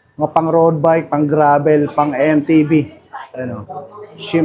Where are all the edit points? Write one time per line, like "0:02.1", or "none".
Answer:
none

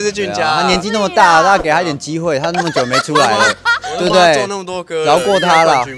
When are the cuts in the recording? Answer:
none

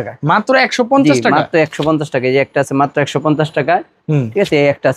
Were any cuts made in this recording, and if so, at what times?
none

